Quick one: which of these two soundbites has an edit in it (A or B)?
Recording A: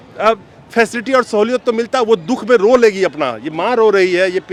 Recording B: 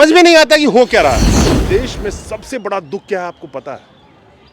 B